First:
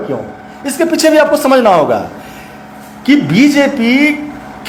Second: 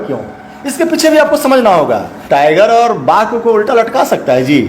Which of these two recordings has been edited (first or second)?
second